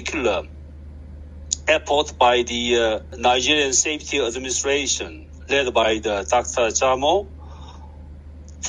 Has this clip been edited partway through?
yes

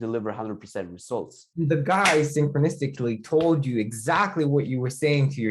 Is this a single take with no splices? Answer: no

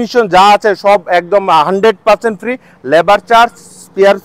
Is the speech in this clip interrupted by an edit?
no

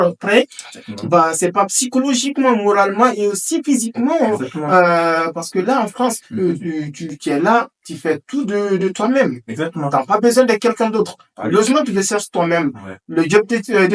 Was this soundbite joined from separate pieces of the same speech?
no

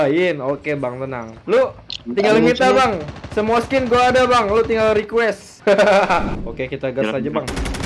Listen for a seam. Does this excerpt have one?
yes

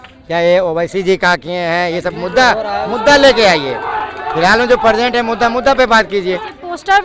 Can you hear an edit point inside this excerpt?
no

